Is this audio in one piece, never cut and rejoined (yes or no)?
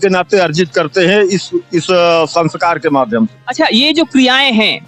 yes